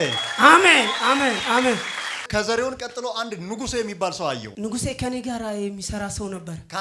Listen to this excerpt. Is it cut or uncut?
cut